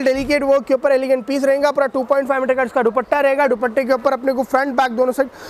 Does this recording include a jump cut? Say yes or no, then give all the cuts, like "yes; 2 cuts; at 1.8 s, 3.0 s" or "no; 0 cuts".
no; 0 cuts